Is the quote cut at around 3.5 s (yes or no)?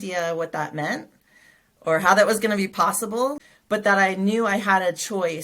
yes